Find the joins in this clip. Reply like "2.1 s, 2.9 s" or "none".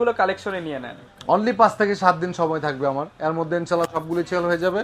none